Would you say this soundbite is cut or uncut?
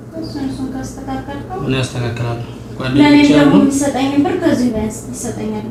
uncut